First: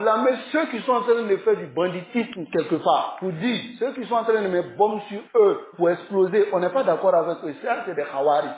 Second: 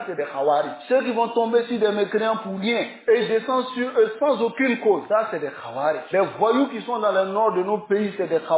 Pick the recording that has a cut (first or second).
first